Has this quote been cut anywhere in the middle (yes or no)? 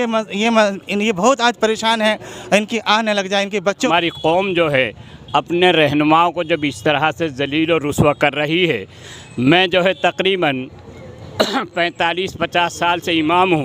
yes